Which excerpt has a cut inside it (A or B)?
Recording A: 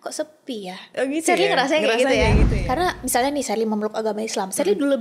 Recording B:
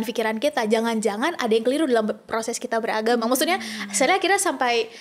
A